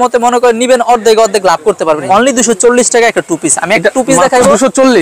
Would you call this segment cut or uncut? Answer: cut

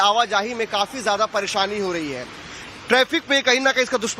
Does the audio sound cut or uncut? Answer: uncut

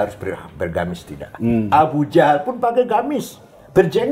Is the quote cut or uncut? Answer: uncut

